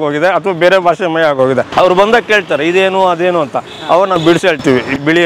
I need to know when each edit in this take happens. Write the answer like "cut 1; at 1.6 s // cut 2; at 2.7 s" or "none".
cut 1; at 1.7 s